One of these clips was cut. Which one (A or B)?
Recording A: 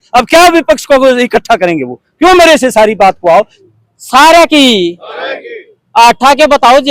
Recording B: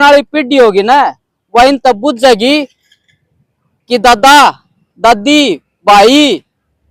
A